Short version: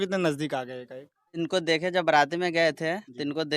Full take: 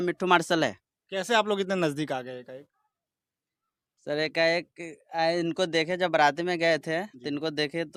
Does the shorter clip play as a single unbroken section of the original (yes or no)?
no